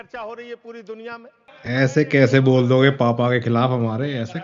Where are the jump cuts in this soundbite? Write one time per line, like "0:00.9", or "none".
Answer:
0:01.5